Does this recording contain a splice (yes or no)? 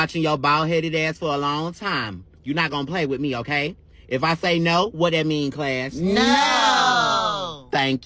no